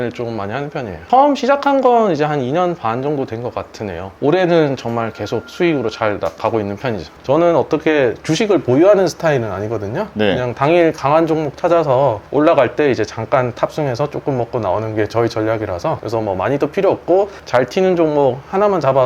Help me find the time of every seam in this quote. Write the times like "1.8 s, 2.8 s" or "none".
1.0 s, 4.1 s, 7.2 s